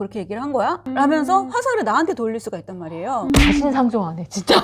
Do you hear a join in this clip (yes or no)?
no